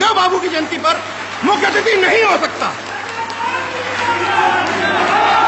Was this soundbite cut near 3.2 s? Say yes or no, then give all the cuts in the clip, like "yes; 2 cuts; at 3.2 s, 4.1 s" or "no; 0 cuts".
no; 0 cuts